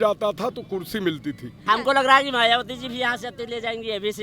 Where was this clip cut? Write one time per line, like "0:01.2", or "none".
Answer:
0:01.6

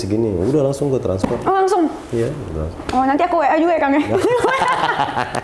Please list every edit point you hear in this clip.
none

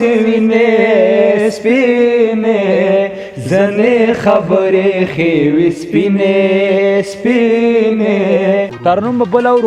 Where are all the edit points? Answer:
0:08.7

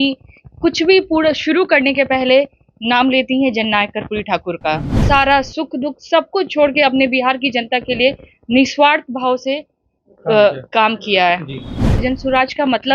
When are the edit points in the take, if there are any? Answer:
0:05.0
0:12.0

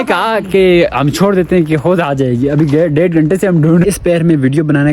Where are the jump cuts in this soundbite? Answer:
0:03.8

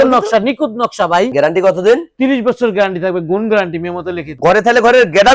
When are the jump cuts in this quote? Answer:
0:01.3
0:04.3

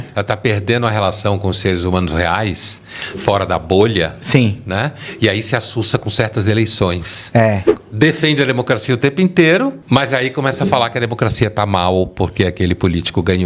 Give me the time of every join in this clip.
0:07.7
0:09.8

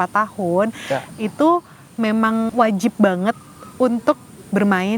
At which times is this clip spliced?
0:02.5

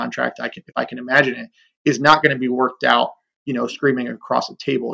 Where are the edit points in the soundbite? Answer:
none

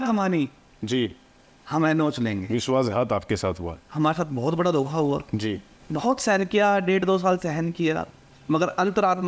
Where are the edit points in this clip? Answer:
0:05.7

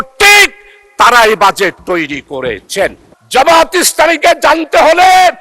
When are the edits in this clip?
0:03.1

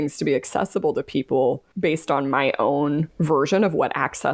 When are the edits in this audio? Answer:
0:01.7
0:03.1

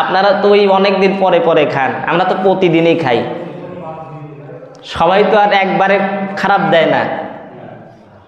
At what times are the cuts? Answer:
none

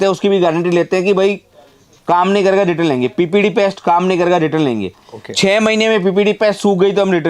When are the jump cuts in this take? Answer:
none

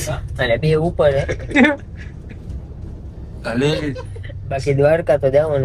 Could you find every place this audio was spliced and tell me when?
0:01.5

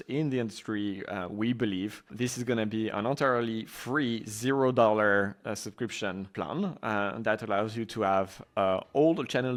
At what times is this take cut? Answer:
none

